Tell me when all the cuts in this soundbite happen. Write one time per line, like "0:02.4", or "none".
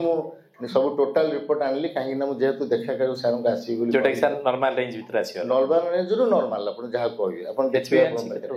none